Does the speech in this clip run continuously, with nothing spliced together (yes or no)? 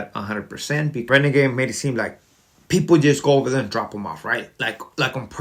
no